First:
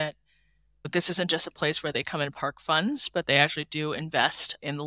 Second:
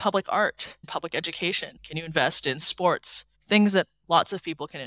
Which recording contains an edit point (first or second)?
second